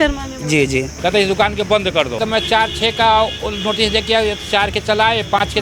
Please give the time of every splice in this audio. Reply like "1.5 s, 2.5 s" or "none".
0.9 s, 2.2 s